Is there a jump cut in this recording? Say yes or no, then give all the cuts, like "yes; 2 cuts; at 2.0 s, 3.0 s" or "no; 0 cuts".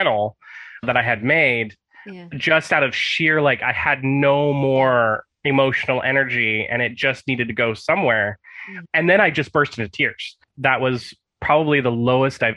yes; 1 cut; at 10.5 s